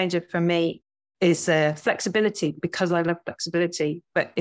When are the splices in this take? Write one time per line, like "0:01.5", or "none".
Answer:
0:00.8
0:02.6